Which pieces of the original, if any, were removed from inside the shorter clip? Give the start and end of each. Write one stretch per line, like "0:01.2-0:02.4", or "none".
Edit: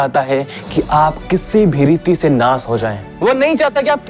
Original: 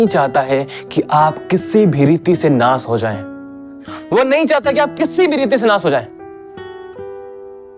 0:03.2-0:03.9